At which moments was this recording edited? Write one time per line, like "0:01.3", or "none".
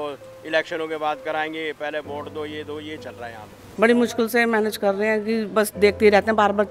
0:03.6